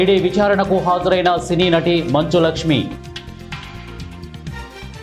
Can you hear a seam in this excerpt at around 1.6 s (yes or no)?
no